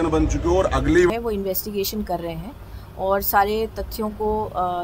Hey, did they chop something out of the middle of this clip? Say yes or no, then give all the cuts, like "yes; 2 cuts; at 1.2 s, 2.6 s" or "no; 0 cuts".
yes; 1 cut; at 1.1 s